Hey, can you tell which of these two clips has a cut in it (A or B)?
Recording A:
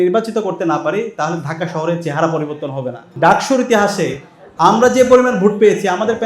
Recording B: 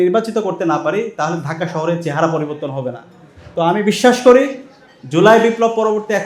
A